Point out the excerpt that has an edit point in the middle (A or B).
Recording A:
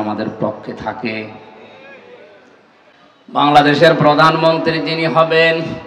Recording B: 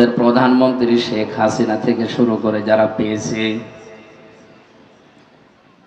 A